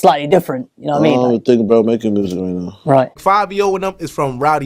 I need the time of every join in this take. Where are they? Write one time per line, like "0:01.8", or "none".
0:03.2